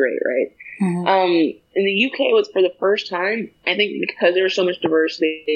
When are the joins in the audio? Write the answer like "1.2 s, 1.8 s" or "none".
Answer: 1.6 s